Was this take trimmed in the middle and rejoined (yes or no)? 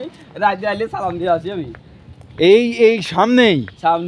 no